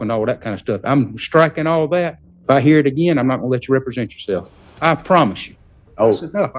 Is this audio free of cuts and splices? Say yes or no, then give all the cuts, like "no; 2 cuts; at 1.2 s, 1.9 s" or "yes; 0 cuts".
no; 3 cuts; at 2.3 s, 4.6 s, 5.7 s